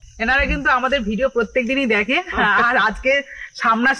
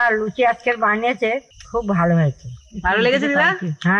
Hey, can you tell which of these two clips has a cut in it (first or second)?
second